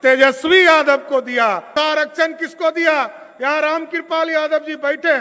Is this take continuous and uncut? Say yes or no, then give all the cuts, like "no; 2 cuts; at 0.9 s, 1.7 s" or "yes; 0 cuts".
no; 1 cut; at 1.7 s